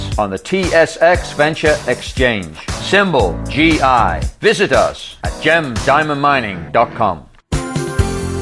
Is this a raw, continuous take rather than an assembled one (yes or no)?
no